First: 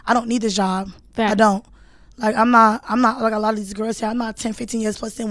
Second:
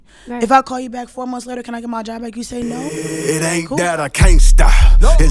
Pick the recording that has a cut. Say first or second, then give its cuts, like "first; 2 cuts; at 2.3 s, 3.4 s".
second; 1 cut; at 2.9 s